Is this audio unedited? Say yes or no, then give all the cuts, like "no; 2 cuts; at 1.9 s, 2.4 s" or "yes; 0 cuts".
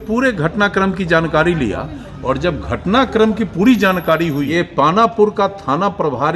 no; 1 cut; at 4.5 s